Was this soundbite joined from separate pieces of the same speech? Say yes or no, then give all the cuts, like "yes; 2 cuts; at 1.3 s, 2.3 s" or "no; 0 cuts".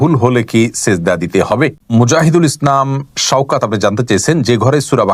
yes; 1 cut; at 1.8 s